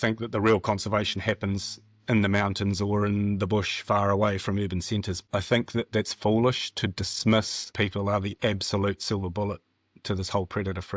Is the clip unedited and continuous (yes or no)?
no